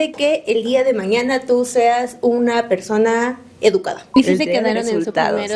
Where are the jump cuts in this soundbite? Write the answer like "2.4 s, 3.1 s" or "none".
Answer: 4.0 s